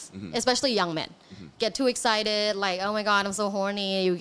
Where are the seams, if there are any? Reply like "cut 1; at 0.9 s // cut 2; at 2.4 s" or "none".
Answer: none